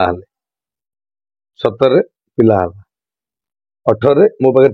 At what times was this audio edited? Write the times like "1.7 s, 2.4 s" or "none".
none